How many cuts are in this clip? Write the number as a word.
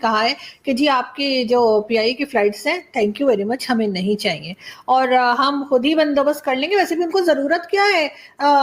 zero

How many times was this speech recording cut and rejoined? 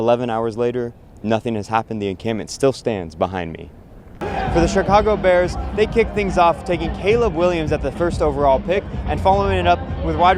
one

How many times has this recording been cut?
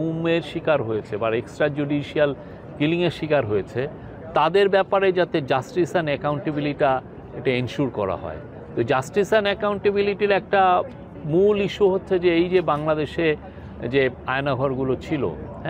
zero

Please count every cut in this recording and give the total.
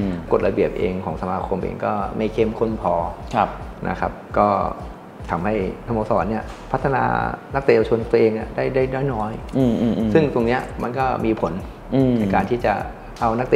zero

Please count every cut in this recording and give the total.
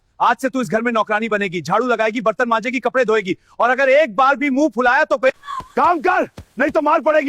one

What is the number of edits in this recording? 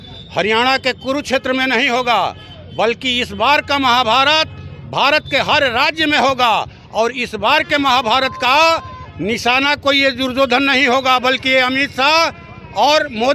zero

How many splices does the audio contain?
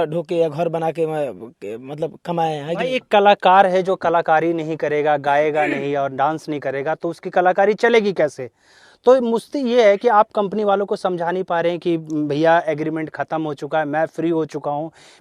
zero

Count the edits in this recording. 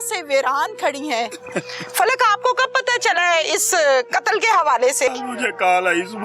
two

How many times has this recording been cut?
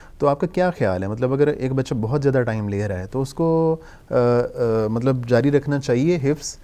zero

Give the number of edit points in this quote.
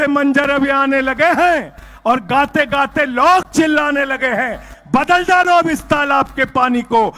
zero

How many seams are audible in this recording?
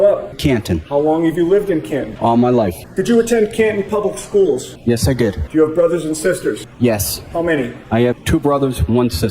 zero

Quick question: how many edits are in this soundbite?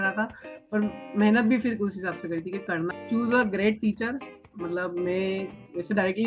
one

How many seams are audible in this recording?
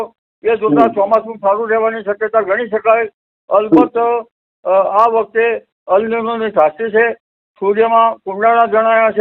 zero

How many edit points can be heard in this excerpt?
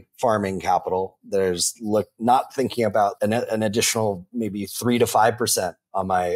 one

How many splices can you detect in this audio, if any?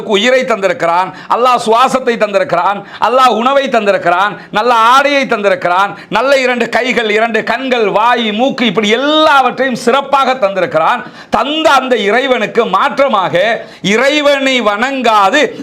zero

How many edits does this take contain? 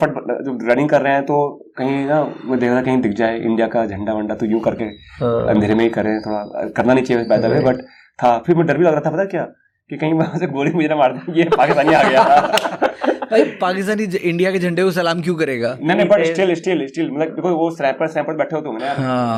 zero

